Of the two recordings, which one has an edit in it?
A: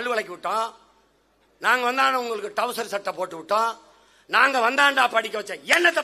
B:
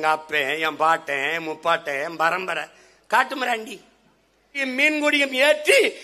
B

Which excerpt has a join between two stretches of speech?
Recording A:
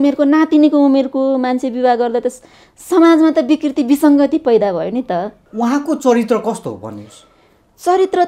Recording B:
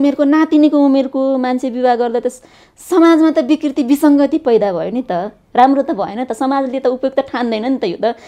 A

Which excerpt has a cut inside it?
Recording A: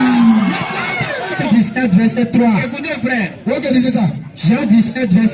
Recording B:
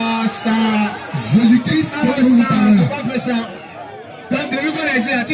A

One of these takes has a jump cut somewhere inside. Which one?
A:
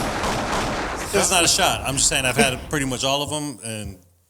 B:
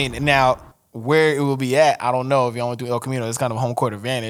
A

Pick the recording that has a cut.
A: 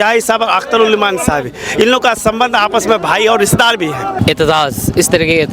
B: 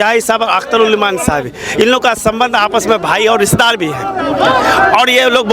A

